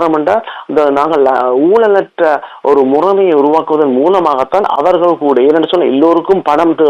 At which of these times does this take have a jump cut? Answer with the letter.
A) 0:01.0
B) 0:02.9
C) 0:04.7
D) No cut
D